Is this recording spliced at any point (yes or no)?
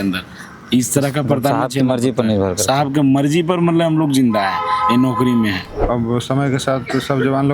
yes